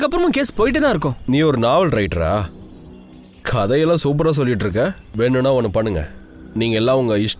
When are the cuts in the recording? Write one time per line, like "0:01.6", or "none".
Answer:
0:01.1